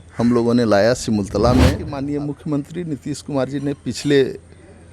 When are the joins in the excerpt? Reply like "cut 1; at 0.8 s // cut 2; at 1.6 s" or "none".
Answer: cut 1; at 1.9 s